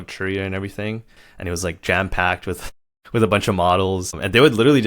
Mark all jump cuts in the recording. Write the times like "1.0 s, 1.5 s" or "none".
1.1 s